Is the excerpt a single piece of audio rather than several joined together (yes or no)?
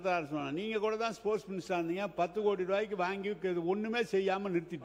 yes